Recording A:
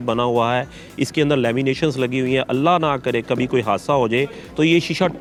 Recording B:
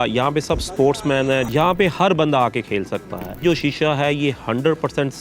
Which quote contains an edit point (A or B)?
B